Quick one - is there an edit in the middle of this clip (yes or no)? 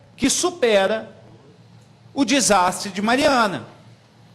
no